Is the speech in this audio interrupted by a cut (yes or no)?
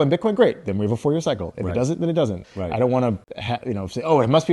yes